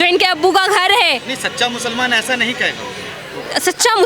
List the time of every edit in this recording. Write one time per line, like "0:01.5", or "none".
none